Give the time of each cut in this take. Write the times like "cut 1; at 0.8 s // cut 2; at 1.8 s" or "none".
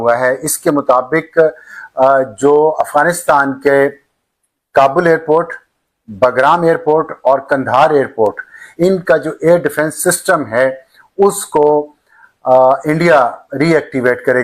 none